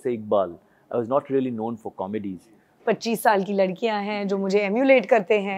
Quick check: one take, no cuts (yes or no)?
no